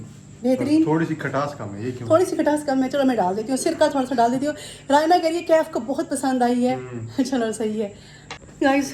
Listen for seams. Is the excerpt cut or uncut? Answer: uncut